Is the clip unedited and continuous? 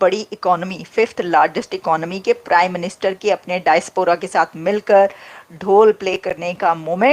yes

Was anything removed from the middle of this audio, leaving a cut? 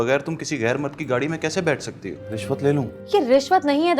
yes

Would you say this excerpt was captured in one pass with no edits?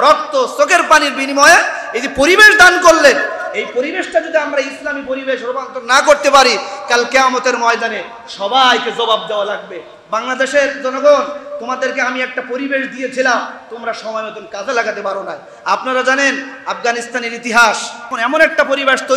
yes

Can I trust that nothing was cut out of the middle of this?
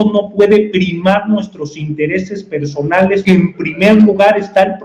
no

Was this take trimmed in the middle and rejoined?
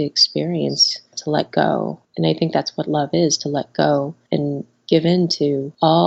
yes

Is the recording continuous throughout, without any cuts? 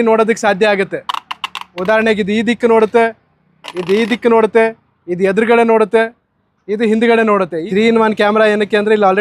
no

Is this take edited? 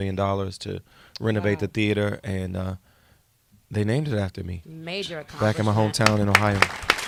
no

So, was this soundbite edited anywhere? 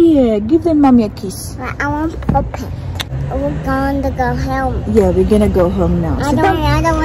yes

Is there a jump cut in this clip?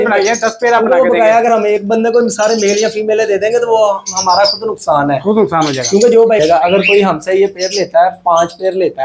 yes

